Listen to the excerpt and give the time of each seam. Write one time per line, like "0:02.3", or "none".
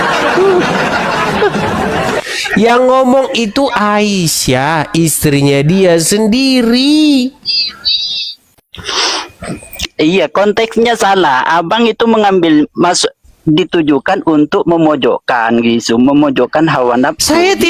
0:01.1